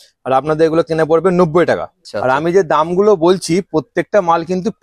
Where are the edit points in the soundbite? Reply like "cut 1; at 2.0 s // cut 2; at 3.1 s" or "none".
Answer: cut 1; at 2.1 s